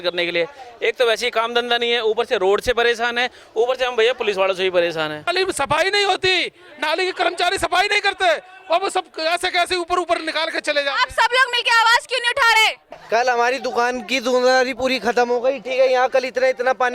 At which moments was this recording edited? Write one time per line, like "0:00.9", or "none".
0:05.2
0:12.9